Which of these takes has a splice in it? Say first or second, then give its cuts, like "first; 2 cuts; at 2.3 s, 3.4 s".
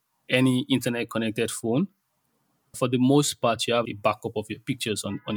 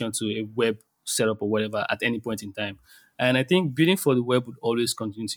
first; 2 cuts; at 2.8 s, 3.9 s